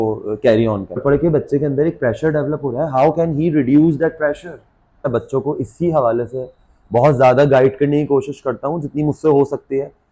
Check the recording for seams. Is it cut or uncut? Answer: cut